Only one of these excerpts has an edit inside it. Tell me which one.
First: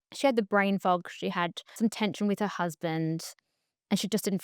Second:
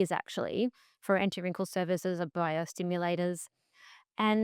first; 1 cut; at 1.7 s

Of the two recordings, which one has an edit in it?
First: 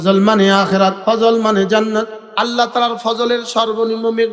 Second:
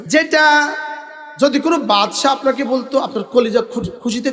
first; 2 cuts; at 1.0 s, 2.2 s

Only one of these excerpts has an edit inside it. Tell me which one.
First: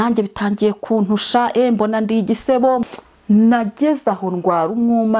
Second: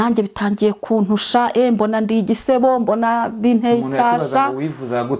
first; 1 cut; at 2.8 s

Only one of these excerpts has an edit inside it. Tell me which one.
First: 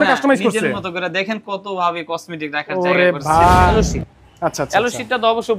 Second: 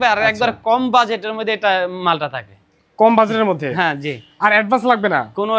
first; 1 cut; at 3.7 s

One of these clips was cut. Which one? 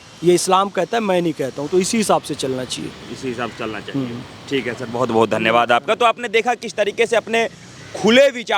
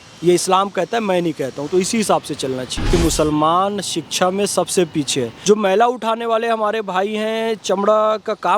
second; 2 cuts; at 2.9 s, 5.3 s

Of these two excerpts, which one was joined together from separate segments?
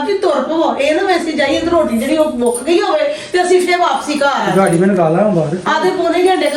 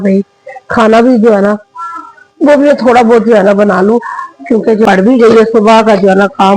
second; 1 cut; at 4.8 s

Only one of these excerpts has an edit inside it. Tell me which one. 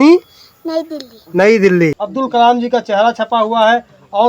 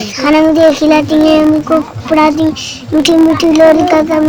first; 1 cut; at 1.9 s

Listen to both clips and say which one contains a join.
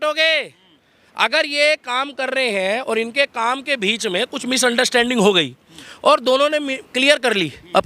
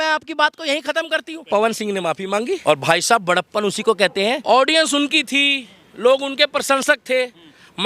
second; 3 cuts; at 1.5 s, 2.6 s, 4.4 s

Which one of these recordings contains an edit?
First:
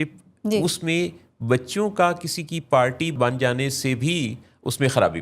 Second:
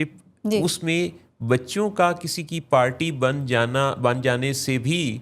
first; 1 cut; at 3.1 s

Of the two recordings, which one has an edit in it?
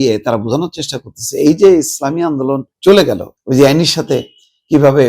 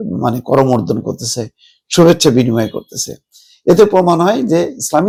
first; 2 cuts; at 2.7 s, 3.3 s

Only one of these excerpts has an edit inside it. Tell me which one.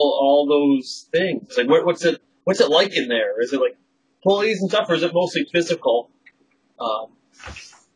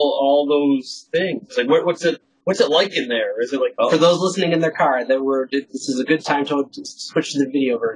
second; 1 cut; at 3.7 s

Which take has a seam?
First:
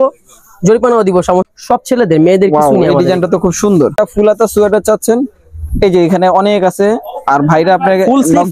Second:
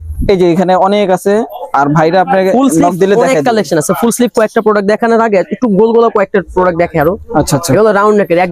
first; 2 cuts; at 1.5 s, 4.0 s

